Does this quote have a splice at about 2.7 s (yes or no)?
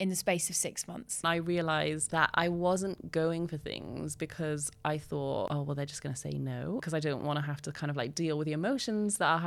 no